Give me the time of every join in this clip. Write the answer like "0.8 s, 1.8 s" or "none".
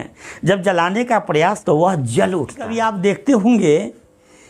1.6 s, 2.7 s